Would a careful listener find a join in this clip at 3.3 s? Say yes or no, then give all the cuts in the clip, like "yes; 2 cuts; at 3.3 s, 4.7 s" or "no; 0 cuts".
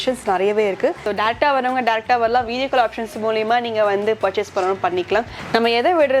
no; 2 cuts; at 1.0 s, 5.4 s